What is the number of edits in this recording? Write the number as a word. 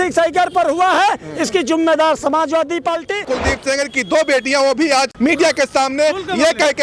two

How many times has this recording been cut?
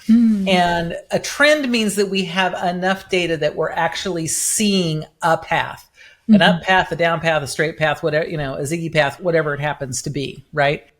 one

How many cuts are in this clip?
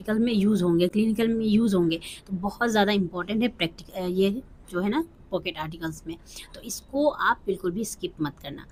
zero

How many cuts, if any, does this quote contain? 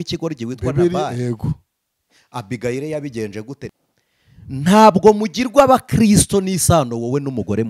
one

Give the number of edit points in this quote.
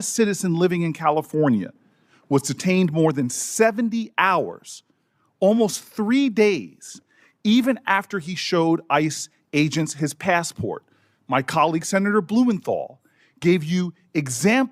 zero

